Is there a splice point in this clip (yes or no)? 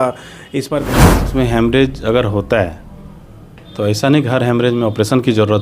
yes